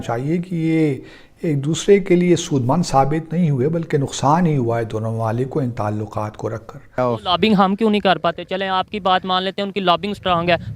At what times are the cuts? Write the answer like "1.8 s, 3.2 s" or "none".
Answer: 7.0 s